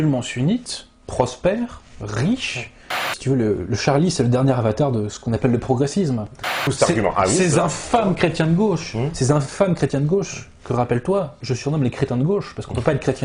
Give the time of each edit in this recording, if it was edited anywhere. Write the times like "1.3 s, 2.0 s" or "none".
3.1 s, 6.6 s